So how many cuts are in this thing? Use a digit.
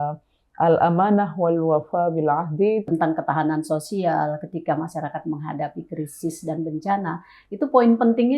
1